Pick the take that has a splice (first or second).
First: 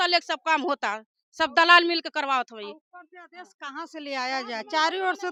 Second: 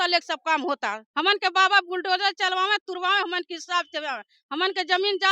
second